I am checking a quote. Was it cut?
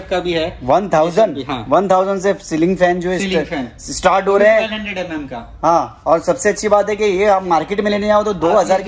no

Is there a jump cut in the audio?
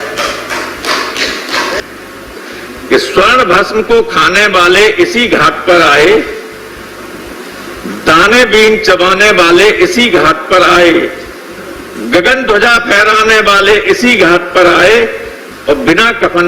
yes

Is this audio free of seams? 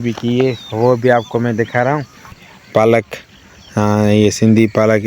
no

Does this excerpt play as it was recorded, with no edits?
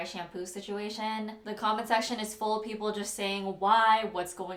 yes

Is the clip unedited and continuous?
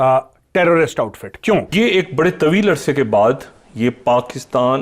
no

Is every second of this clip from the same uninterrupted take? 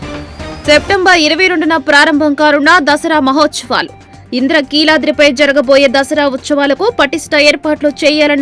yes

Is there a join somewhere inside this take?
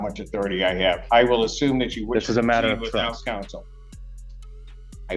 no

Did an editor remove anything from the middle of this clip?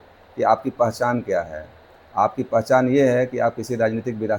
no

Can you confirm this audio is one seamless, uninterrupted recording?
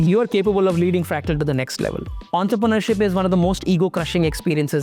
no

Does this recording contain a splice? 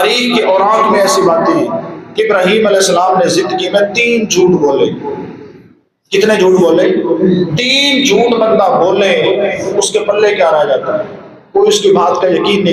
no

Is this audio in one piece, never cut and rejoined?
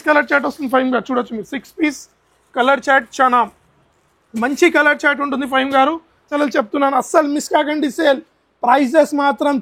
no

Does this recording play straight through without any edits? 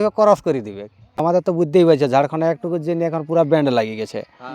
no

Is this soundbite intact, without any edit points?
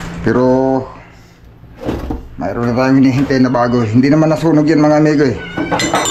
yes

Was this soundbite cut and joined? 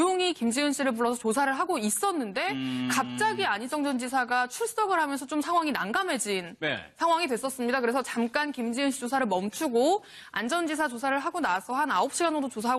yes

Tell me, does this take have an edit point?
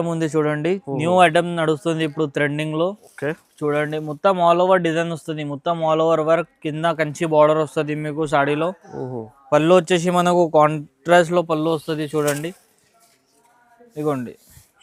no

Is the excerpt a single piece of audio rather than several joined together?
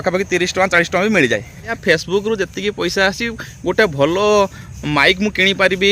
no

